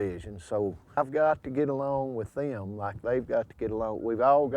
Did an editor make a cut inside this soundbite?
yes; 1 cut; at 1.0 s

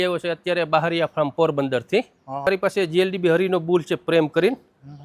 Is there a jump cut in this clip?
yes; 1 cut; at 2.5 s

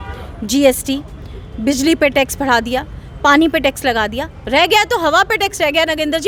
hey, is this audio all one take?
yes; 0 cuts

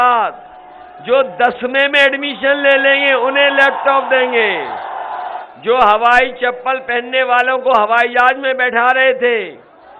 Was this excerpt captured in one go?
no; 1 cut; at 5.5 s

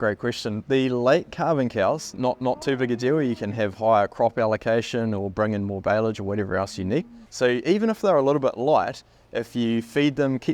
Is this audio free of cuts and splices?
no; 1 cut; at 7.2 s

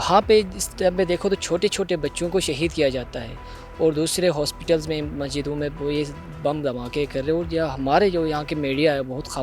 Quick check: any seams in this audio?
no; 0 cuts

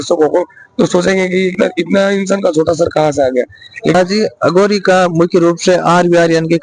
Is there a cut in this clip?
yes; 2 cuts; at 1.5 s, 3.9 s

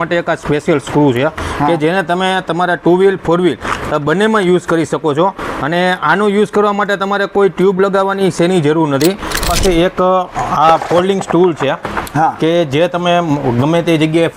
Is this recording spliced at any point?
yes; 1 cut; at 9.5 s

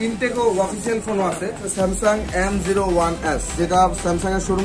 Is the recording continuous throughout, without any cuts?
no; 2 cuts; at 1.6 s, 3.5 s

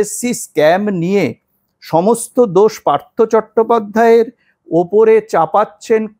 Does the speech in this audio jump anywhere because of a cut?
no; 0 cuts

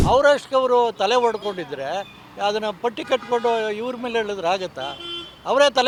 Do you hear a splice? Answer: no; 0 cuts

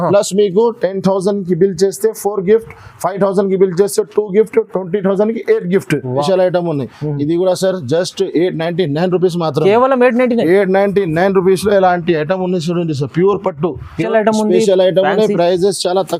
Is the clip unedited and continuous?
no; 2 cuts; at 6.1 s, 14.0 s

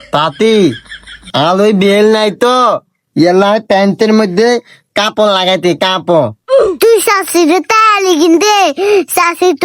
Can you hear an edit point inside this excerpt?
no; 0 cuts

